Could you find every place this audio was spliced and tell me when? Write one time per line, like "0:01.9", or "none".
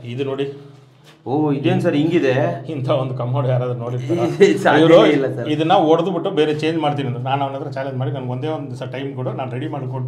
none